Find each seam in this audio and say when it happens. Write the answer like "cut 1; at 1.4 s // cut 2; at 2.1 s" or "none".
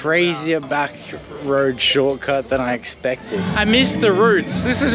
cut 1; at 3.4 s

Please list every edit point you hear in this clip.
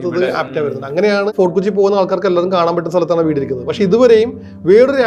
cut 1; at 1.3 s

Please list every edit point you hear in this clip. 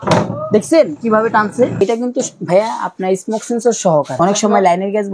cut 1; at 1.7 s // cut 2; at 4.1 s

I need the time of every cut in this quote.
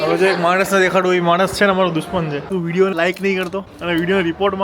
cut 1; at 2.5 s // cut 2; at 3.7 s

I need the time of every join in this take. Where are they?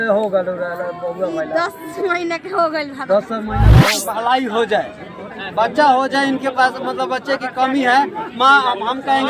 cut 1; at 3.8 s

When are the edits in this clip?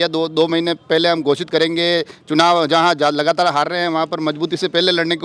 none

